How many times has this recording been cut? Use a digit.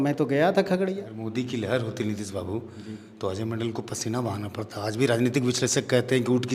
1